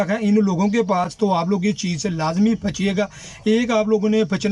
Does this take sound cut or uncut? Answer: uncut